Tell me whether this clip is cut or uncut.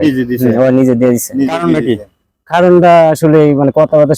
uncut